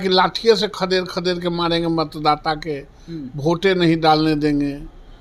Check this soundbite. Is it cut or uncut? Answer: uncut